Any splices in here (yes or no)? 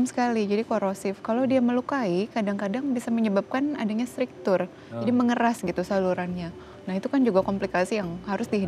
no